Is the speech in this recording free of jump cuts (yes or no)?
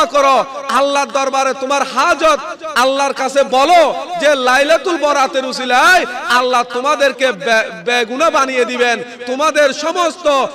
yes